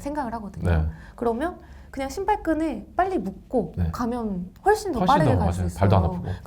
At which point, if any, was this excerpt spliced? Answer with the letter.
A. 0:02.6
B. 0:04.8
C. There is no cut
C